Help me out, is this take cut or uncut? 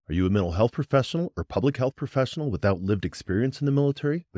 uncut